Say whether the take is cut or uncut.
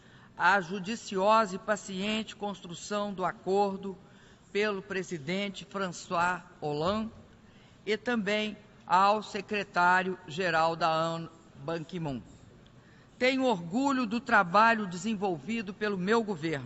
cut